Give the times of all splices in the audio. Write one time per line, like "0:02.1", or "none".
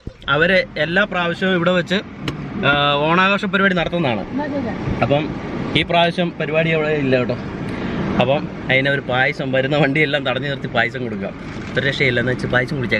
none